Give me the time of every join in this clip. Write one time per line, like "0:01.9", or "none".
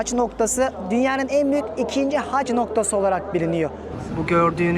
0:03.8